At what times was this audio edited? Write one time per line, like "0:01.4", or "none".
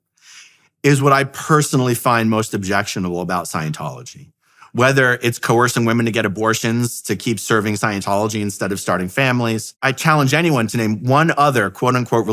0:09.8